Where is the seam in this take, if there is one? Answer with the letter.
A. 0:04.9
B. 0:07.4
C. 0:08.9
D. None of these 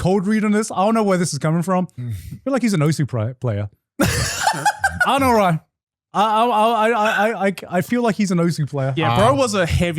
C